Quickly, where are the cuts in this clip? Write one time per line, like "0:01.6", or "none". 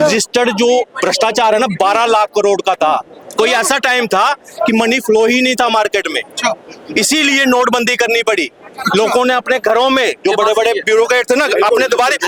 none